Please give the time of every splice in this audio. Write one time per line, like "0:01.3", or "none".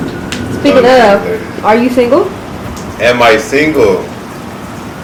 none

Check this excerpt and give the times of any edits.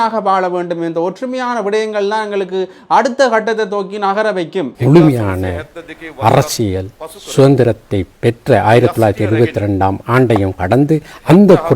0:04.7

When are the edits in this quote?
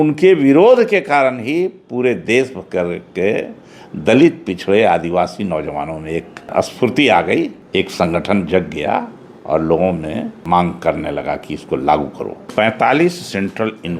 0:06.5
0:07.6
0:10.4
0:12.4

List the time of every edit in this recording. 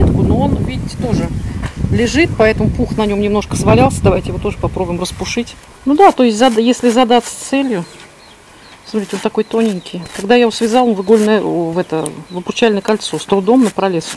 0:05.6

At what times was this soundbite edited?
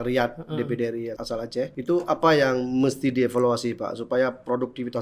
0:01.3

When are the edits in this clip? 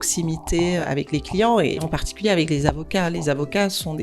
0:00.8
0:01.9

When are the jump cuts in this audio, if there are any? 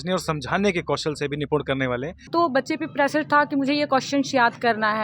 0:02.3

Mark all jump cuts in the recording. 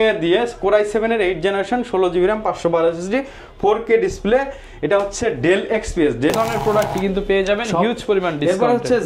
0:06.3

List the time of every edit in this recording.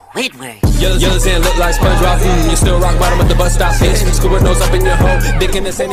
none

